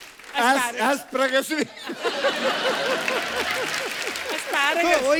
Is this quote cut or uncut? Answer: uncut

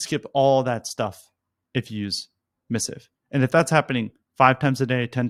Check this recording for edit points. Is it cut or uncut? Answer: uncut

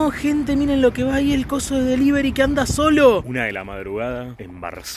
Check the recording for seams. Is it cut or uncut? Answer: cut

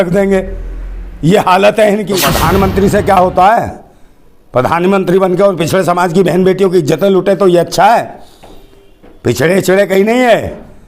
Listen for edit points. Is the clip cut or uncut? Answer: cut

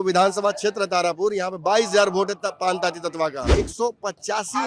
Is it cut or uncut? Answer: cut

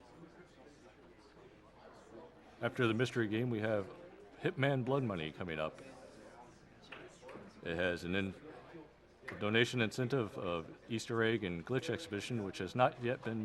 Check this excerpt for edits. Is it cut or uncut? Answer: cut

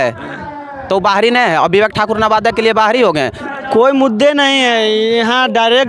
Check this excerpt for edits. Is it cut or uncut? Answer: cut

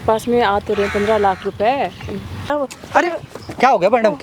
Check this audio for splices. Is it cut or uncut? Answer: cut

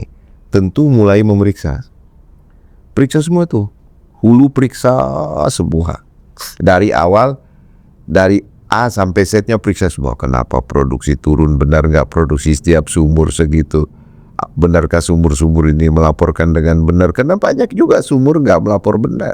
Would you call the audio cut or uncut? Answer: uncut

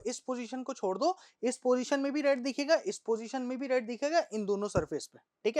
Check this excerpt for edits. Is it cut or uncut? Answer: uncut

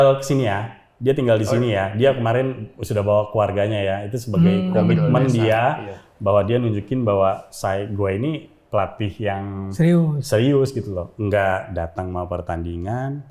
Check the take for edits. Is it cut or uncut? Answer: uncut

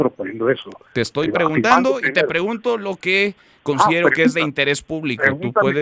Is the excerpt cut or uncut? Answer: uncut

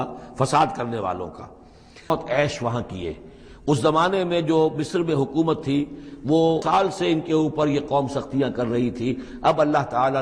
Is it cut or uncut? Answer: cut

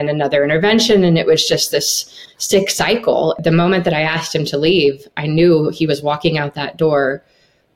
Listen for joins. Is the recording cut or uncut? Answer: cut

